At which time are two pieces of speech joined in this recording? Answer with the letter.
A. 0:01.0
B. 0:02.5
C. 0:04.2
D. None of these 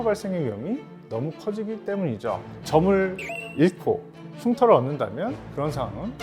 B